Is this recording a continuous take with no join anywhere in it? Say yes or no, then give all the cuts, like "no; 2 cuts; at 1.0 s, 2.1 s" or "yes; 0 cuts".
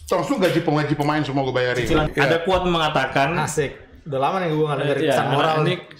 no; 1 cut; at 2.1 s